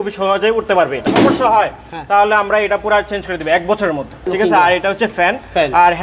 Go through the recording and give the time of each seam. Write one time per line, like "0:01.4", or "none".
0:01.1
0:04.2